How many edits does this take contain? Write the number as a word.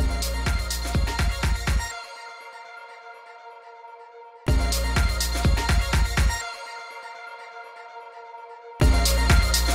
two